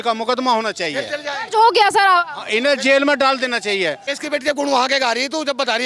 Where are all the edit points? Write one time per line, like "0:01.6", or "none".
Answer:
0:04.1